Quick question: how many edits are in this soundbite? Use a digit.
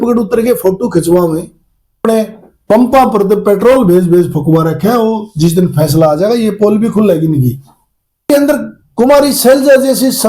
2